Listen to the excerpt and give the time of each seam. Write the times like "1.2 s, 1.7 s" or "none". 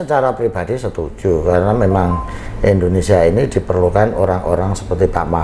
none